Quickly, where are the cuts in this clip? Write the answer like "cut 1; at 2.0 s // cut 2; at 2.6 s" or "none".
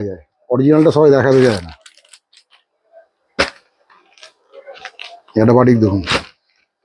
none